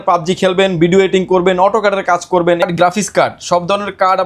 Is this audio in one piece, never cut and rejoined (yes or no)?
no